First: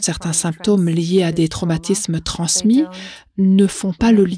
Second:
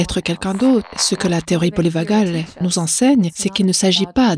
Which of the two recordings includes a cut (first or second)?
second